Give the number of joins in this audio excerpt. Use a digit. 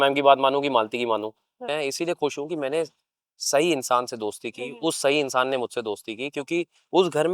1